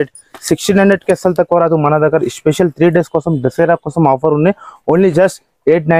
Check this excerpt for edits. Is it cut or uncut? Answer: uncut